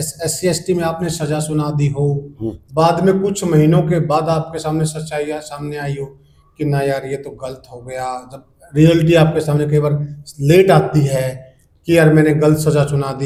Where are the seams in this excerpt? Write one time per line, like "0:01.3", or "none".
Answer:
none